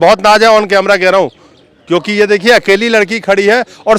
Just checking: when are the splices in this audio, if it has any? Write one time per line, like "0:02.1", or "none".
none

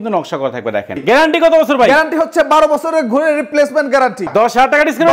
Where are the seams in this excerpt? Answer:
0:01.0
0:04.2

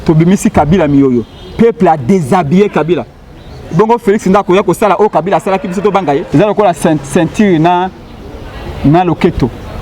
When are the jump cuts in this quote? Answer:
0:06.3

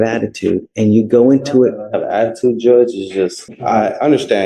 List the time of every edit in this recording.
0:03.5

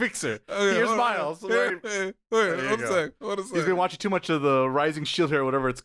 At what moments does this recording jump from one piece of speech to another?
none

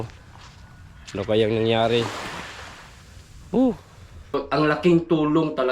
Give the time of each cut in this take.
0:04.4

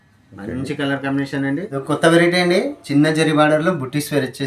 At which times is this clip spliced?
0:01.7

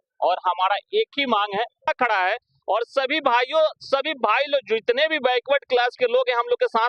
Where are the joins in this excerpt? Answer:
0:01.9

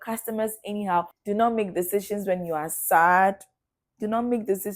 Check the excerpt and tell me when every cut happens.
0:01.1

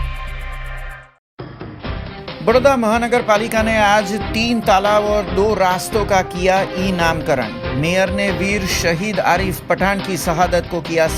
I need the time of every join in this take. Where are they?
0:00.9

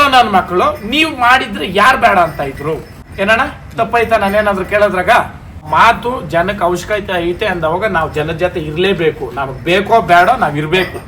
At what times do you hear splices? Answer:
0:03.0
0:05.7

